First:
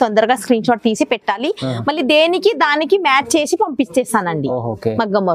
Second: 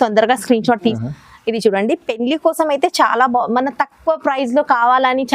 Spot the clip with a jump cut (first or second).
second